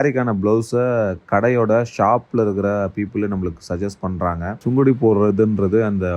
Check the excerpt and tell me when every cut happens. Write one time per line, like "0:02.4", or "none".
0:04.5